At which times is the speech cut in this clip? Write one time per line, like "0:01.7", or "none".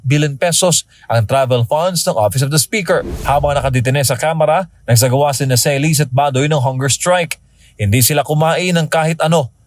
0:03.1